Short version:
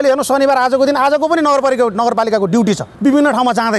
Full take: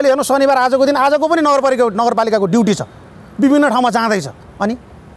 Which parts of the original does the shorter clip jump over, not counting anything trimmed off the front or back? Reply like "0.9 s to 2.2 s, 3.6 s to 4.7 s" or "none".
2.9 s to 3.3 s